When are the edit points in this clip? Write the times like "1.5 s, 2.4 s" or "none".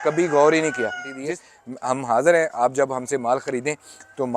1.1 s

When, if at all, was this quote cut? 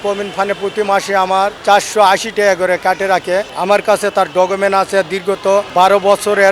1.6 s, 3.5 s, 5.7 s

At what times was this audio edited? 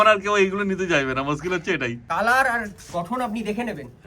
2.0 s

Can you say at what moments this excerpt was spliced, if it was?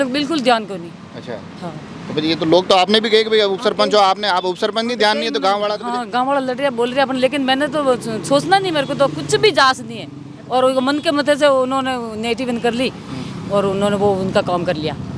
none

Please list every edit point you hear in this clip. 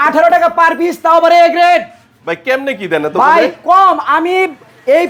none

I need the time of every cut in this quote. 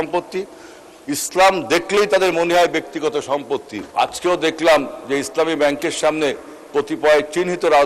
3.8 s

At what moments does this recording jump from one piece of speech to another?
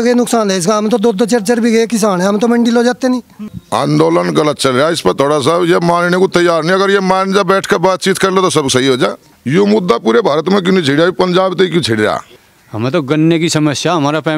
3.5 s, 9.3 s, 12.3 s

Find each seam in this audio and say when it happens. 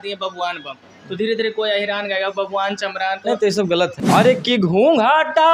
4.0 s

